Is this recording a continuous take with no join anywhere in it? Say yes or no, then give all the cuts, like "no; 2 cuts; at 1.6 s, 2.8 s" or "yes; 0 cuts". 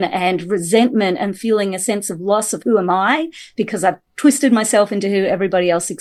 yes; 0 cuts